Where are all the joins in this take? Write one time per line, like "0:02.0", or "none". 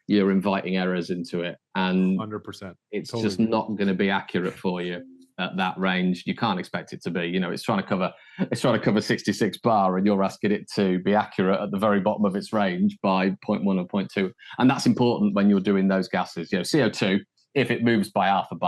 none

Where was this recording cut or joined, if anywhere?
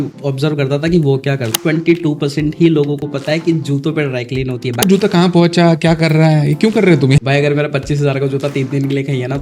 0:01.6
0:04.8
0:07.2

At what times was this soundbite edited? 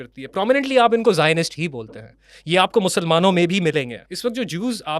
0:04.0

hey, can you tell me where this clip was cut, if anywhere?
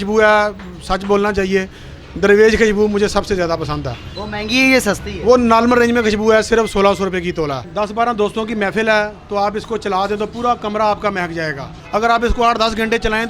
0:07.6
0:11.7

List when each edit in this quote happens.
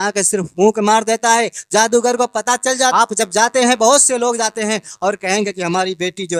0:02.9

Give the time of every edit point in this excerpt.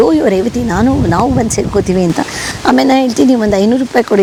none

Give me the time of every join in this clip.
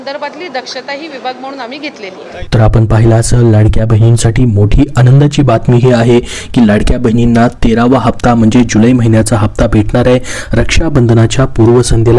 none

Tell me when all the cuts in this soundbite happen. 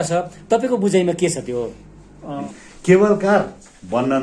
0:02.5

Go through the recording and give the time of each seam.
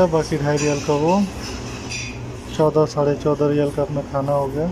none

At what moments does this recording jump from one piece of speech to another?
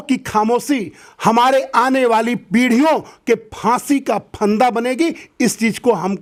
none

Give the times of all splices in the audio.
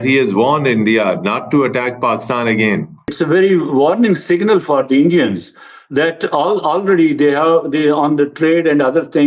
0:03.1

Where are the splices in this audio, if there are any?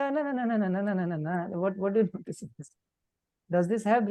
none

